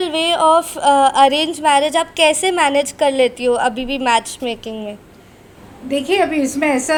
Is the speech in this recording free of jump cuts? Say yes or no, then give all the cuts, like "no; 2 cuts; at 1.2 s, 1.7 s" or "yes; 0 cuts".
yes; 0 cuts